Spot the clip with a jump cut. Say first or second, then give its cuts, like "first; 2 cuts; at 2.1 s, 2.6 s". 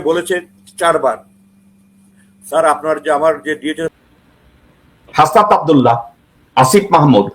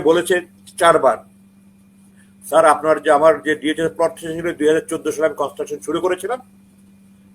first; 1 cut; at 3.9 s